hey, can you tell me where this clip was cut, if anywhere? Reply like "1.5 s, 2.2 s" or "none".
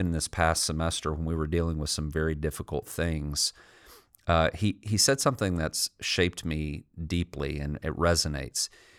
none